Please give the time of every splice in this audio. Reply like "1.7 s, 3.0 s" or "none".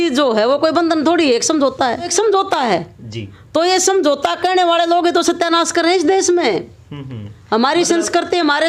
2.1 s